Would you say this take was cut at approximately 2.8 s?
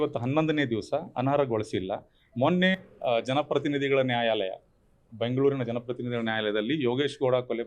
yes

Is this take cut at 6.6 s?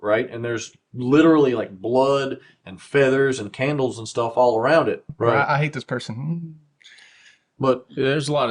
no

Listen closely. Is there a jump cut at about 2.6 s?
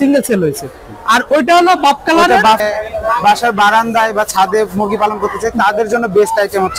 yes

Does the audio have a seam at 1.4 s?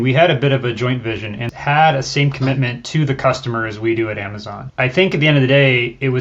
yes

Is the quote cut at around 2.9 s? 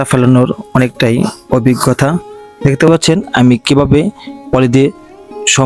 yes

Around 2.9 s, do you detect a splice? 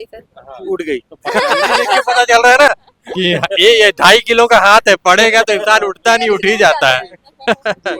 no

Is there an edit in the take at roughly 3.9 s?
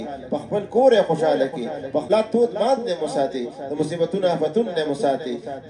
no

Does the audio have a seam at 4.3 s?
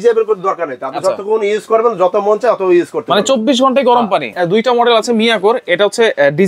yes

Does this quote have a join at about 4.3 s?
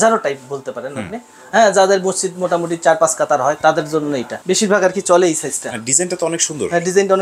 yes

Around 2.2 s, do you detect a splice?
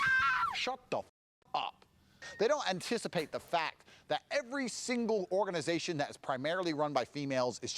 yes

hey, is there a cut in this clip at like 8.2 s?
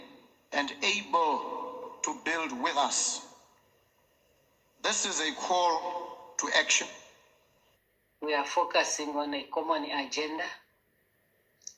yes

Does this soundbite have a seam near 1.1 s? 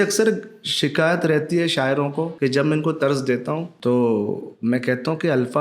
no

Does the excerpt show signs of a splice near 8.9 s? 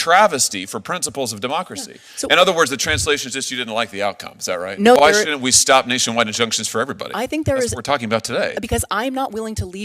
no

